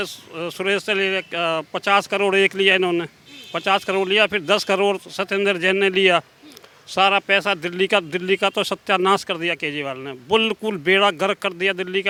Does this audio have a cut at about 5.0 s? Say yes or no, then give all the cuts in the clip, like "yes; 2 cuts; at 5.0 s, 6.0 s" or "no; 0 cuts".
no; 0 cuts